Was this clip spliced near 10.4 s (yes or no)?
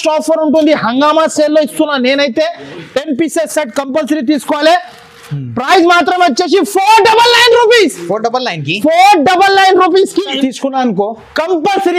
yes